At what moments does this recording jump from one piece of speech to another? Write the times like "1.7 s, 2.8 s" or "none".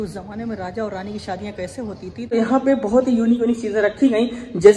2.3 s